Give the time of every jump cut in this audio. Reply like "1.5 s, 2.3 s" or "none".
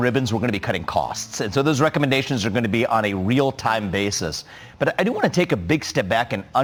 none